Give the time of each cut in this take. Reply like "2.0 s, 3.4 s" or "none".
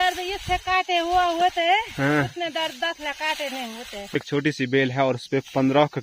4.2 s